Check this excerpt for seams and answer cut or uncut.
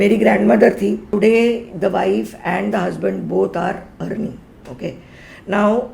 cut